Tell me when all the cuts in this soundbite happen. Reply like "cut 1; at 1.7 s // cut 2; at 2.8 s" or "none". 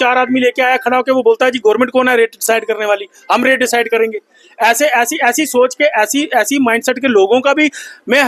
none